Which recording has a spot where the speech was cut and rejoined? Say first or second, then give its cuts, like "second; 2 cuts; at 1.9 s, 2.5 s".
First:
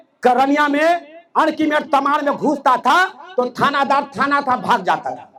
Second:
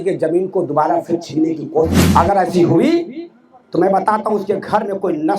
second; 1 cut; at 2.0 s